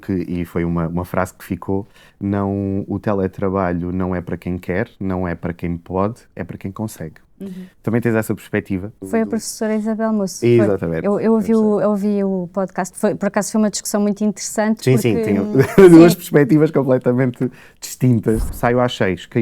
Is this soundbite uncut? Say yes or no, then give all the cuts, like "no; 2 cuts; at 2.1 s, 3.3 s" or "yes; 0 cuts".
no; 2 cuts; at 9.0 s, 18.5 s